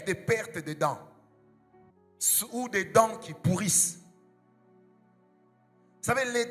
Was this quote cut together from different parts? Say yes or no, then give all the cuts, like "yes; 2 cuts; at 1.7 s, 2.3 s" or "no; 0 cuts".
no; 0 cuts